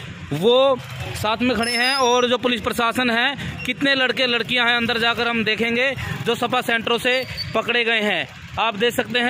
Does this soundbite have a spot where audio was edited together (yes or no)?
no